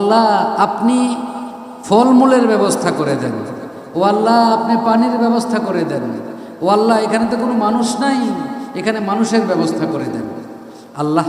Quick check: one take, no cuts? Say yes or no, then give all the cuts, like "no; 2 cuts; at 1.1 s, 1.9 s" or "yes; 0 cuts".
yes; 0 cuts